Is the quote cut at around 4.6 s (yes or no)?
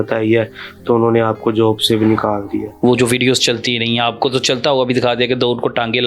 no